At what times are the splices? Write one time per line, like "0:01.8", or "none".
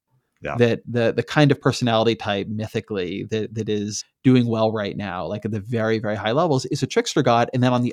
0:03.9